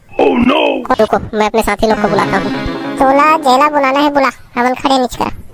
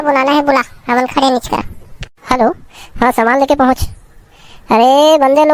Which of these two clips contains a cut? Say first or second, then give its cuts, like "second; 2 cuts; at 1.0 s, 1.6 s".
first; 1 cut; at 0.9 s